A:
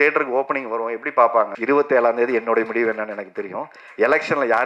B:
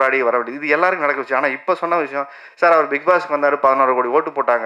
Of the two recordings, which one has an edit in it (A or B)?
A